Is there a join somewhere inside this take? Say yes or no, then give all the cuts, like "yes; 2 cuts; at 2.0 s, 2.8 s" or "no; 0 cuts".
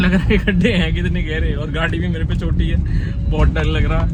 no; 0 cuts